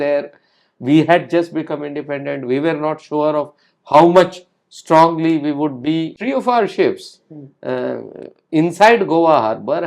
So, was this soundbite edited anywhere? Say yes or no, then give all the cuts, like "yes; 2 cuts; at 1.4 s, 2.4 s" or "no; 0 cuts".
yes; 1 cut; at 6.2 s